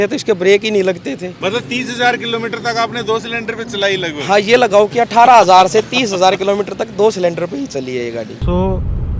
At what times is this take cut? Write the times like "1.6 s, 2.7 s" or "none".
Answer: 1.3 s, 8.3 s